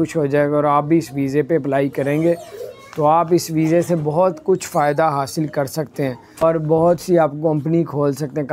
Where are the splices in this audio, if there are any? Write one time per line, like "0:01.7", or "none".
0:06.4